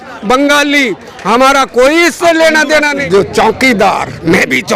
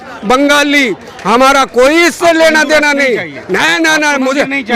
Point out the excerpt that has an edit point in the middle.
first; 1 cut; at 3.0 s

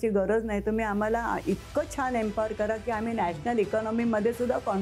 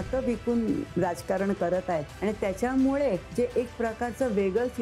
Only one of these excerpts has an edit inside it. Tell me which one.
second; 3 cuts; at 0.9 s, 2.1 s, 3.3 s

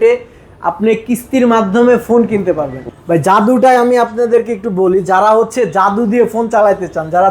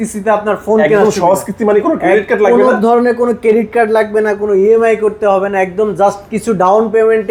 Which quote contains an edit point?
first; 1 cut; at 2.7 s

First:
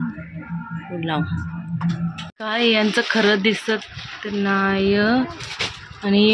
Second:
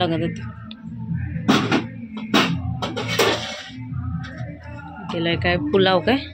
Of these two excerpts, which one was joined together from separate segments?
first; 1 cut; at 2.3 s

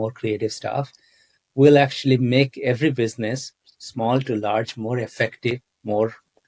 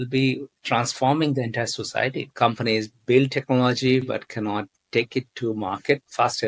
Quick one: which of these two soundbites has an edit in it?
second; 1 cut; at 2.2 s

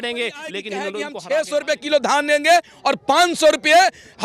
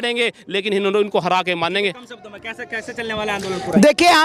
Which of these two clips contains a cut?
first; 1 cut; at 1.0 s

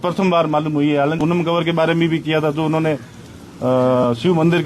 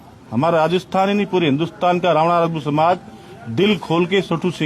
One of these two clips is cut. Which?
first; 1 cut; at 1.2 s

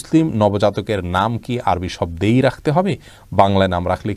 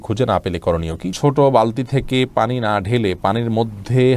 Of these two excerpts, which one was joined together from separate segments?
second; 1 cut; at 1.1 s

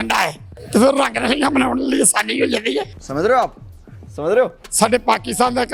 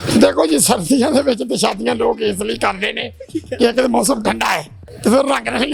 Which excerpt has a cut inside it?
first; 1 cut; at 4.6 s

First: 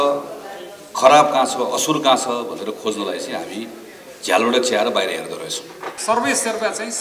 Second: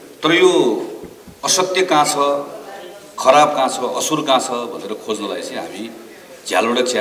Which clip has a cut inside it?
first; 1 cut; at 5.9 s

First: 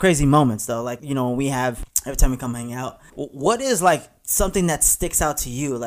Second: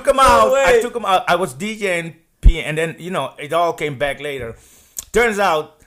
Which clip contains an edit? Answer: first; 3 cuts; at 1.0 s, 1.9 s, 3.0 s

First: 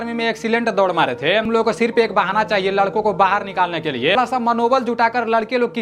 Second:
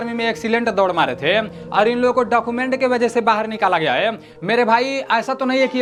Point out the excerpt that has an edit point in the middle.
first; 2 cuts; at 1.5 s, 4.2 s

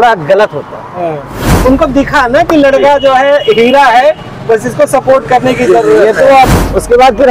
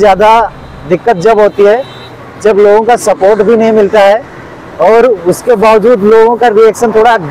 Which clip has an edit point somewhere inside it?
first; 2 cuts; at 1.5 s, 6.5 s

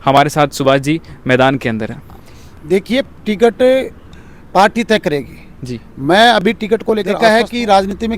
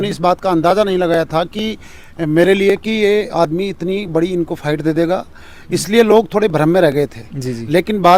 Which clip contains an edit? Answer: first; 1 cut; at 7.1 s

